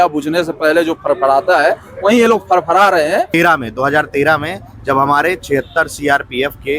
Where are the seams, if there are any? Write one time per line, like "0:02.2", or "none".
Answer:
0:03.3